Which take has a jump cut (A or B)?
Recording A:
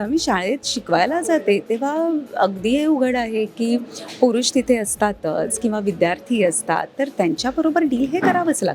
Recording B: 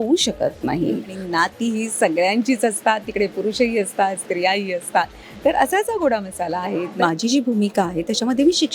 B